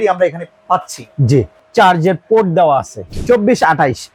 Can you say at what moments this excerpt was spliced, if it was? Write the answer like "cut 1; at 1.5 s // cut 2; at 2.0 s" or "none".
cut 1; at 1.6 s // cut 2; at 3.0 s

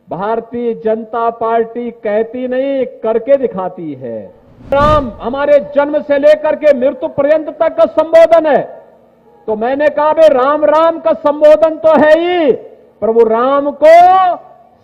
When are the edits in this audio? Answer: cut 1; at 4.7 s

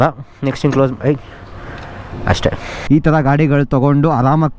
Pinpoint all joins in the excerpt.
cut 1; at 2.7 s

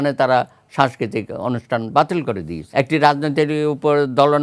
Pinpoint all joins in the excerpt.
cut 1; at 2.6 s

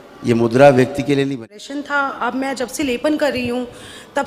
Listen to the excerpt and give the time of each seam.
cut 1; at 1.3 s

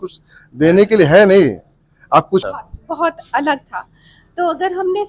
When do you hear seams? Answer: cut 1; at 2.4 s

